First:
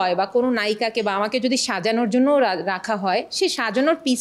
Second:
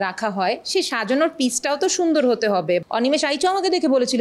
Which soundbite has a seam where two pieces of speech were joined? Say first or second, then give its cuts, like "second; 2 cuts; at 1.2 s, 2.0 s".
second; 1 cut; at 2.9 s